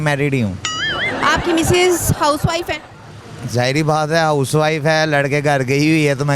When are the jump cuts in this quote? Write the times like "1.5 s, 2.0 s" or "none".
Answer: 1.1 s